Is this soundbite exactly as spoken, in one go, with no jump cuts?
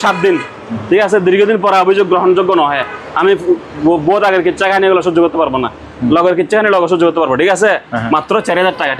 yes; 0 cuts

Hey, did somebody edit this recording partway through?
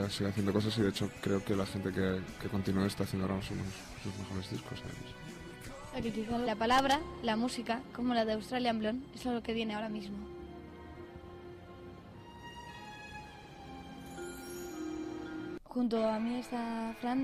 no; 0 cuts

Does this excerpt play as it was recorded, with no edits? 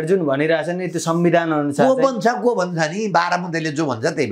yes; 0 cuts

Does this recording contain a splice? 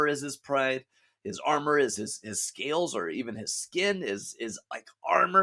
no; 0 cuts

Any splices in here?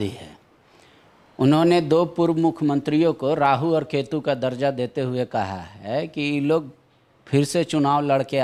no; 0 cuts

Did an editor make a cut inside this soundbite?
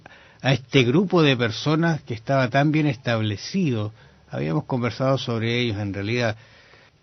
no; 0 cuts

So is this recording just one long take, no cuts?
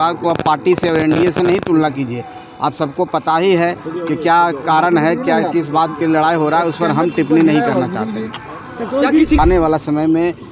no; 1 cut; at 9.4 s

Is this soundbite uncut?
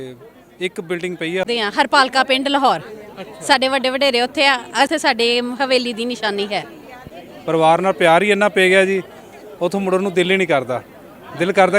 no; 3 cuts; at 1.4 s, 4.9 s, 7.1 s

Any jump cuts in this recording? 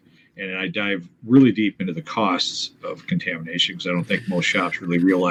no; 0 cuts

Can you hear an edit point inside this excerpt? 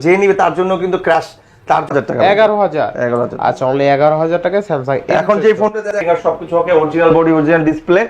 yes; 2 cuts; at 1.9 s, 6.0 s

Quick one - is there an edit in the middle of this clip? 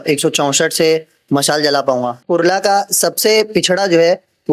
yes; 1 cut; at 2.2 s

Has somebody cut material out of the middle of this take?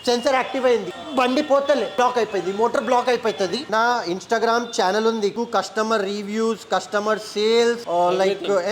yes; 4 cuts; at 1.0 s, 2.0 s, 3.6 s, 5.3 s

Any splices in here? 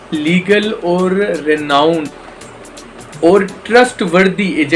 no; 0 cuts

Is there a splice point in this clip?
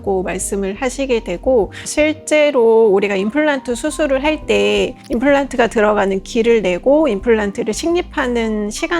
no; 0 cuts

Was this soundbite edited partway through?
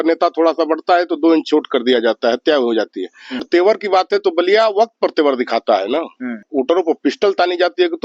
yes; 2 cuts; at 3.4 s, 6.5 s

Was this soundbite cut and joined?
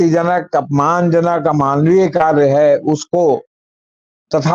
no; 0 cuts

